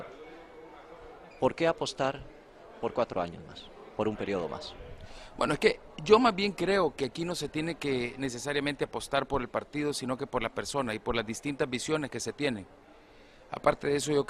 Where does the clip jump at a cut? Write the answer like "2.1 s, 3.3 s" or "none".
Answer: 3.8 s

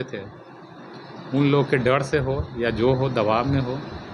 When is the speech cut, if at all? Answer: none

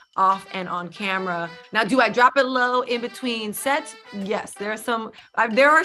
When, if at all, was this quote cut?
1.6 s

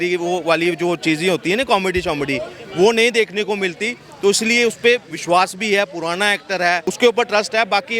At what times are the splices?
6.9 s

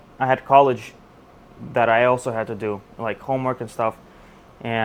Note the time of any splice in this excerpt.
none

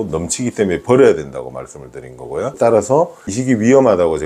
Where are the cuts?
2.5 s

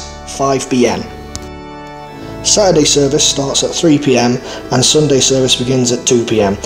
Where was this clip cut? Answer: none

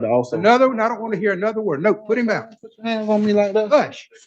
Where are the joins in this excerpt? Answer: none

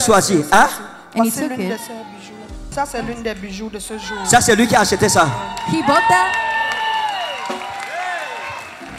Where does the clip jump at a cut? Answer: 2.5 s

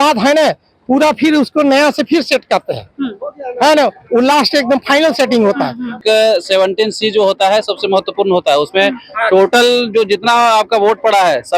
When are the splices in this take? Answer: 6.0 s

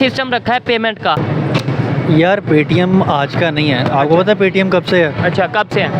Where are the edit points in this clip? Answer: 1.2 s

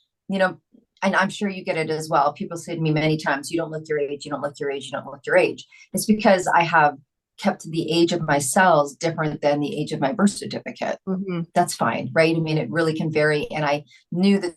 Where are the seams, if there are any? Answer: none

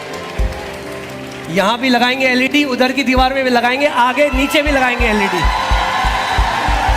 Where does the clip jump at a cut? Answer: 3.7 s

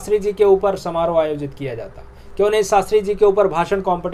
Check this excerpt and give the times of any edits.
none

